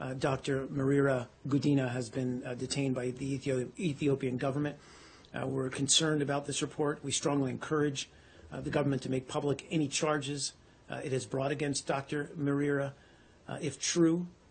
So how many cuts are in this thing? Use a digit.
1